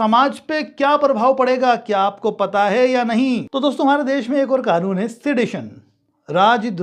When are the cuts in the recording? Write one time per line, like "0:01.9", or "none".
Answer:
0:03.5